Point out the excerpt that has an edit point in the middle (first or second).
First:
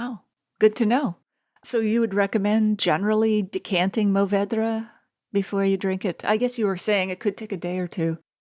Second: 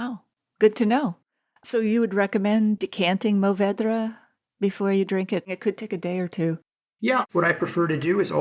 second